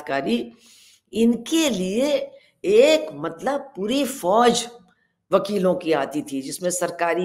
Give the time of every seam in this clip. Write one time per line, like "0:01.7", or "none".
none